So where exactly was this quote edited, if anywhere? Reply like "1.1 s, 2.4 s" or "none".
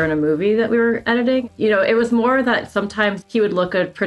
1.5 s